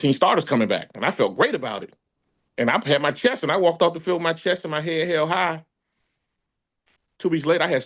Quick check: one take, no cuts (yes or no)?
yes